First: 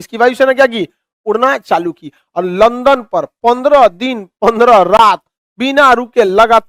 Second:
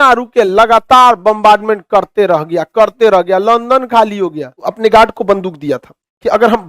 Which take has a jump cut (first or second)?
second